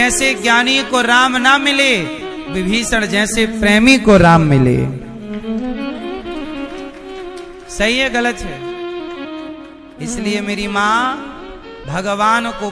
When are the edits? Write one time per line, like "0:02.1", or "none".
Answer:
none